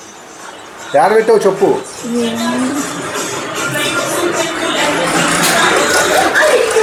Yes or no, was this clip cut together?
no